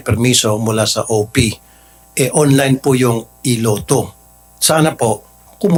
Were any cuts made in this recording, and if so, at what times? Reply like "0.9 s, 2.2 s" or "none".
none